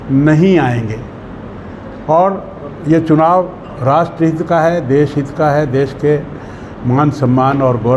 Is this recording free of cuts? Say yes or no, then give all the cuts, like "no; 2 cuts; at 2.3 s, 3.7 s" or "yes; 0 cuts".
yes; 0 cuts